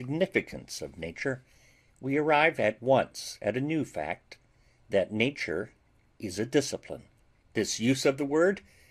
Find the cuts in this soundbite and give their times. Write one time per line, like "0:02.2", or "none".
0:01.9